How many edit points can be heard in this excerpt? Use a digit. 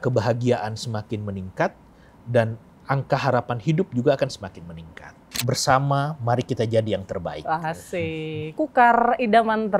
1